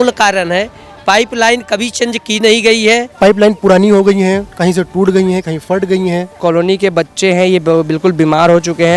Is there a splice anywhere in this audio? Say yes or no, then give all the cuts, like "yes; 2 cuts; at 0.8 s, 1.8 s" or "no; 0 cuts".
yes; 2 cuts; at 3.1 s, 6.3 s